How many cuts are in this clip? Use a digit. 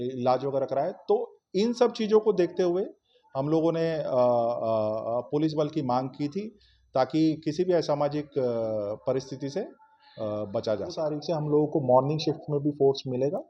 1